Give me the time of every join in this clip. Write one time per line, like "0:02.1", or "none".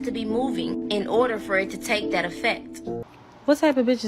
0:03.1